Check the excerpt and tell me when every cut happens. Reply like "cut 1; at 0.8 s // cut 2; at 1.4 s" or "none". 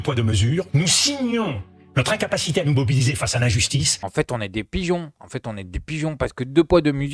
cut 1; at 4.0 s